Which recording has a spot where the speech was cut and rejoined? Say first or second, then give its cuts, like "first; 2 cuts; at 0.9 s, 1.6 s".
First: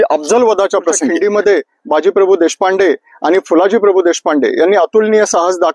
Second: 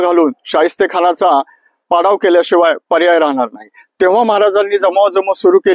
first; 1 cut; at 1.1 s